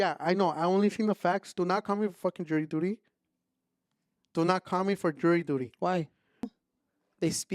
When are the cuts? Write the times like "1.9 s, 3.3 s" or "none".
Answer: 6.6 s